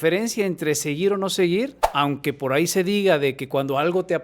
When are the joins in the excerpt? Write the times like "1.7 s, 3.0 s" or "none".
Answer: 1.8 s